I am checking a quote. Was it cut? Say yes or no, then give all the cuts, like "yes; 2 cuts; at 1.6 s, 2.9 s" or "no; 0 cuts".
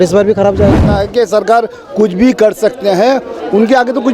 yes; 1 cut; at 1.0 s